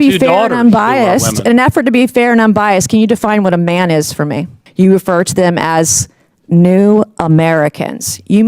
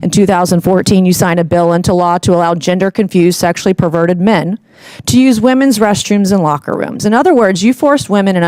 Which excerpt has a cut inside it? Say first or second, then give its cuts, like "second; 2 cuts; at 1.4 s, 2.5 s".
first; 1 cut; at 4.6 s